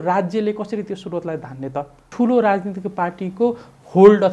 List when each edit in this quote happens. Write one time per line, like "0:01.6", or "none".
0:02.1